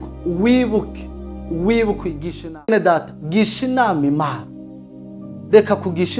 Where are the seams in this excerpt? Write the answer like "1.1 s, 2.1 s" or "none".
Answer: 2.7 s